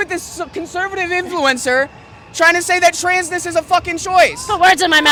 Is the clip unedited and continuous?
yes; 0 cuts

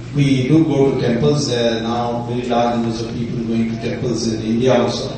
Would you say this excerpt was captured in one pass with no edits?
no; 1 cut; at 1.4 s

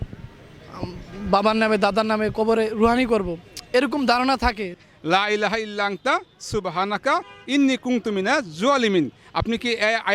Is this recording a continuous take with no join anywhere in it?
no; 1 cut; at 4.7 s

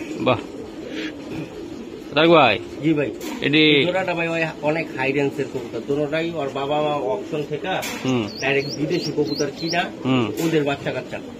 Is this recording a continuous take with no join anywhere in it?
yes; 0 cuts

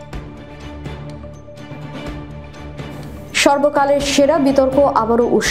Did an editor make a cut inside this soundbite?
yes; 1 cut; at 2.3 s

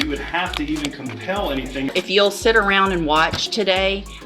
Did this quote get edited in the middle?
yes; 1 cut; at 1.9 s

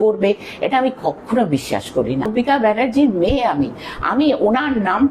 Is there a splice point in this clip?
yes; 1 cut; at 2.3 s

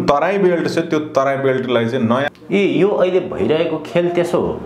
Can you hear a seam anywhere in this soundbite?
yes; 1 cut; at 2.3 s

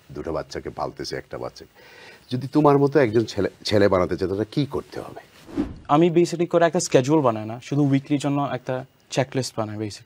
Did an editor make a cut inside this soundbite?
yes; 1 cut; at 5.7 s

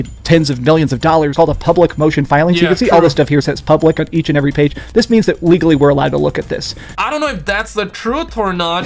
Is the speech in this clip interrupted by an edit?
yes; 2 cuts; at 1.3 s, 6.9 s

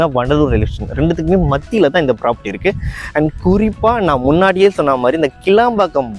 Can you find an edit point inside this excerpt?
no; 0 cuts

